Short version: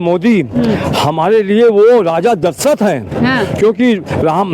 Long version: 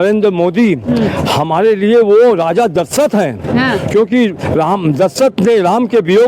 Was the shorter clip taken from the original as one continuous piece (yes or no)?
yes